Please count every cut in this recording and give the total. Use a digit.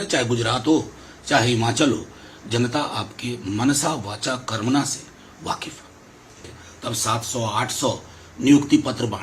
1